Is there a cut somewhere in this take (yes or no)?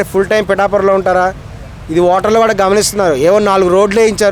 no